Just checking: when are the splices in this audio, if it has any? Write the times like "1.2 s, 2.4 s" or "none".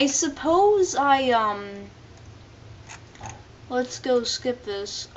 3.2 s

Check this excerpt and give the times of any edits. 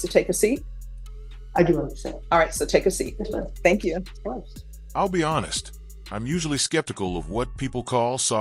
none

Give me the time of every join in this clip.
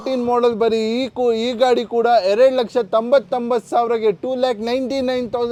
none

